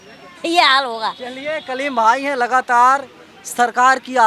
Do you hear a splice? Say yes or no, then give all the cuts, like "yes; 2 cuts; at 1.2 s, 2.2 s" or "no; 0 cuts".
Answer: no; 0 cuts